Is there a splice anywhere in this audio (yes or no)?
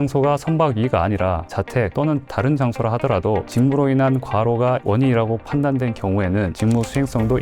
no